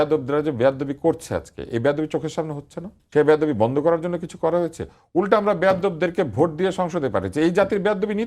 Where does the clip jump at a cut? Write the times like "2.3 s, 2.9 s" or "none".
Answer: 3.0 s